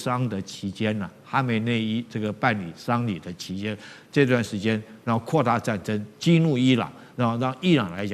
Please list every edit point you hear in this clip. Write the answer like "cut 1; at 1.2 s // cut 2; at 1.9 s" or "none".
none